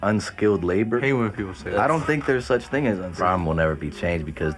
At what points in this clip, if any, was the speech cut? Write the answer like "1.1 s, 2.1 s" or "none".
1.0 s, 3.1 s